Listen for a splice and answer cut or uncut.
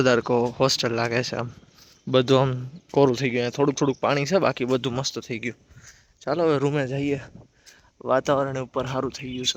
uncut